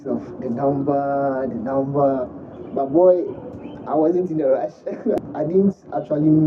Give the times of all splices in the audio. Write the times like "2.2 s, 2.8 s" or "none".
5.2 s